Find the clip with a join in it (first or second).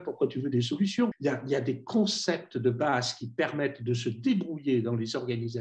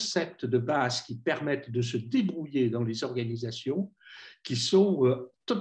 first